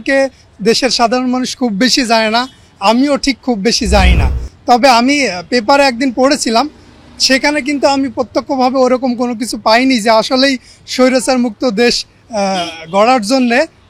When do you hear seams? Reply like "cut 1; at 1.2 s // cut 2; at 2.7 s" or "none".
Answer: none